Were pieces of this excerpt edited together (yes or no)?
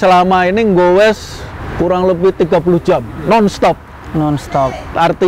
no